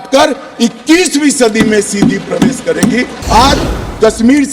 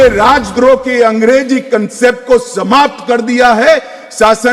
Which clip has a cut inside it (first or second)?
first